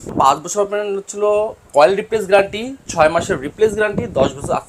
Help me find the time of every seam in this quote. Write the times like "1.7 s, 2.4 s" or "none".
1.7 s